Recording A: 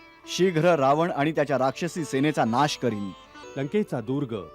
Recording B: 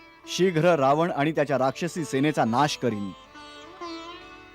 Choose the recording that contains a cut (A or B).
A